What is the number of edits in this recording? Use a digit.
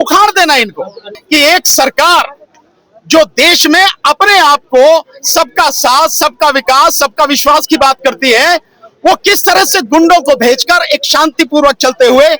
1